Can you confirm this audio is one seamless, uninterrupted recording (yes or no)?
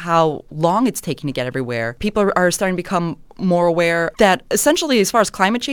no